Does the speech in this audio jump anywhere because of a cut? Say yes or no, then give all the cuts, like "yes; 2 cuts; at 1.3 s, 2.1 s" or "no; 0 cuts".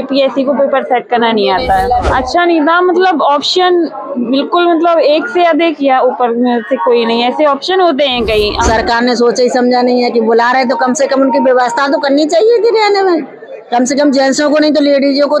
yes; 2 cuts; at 2.1 s, 8.7 s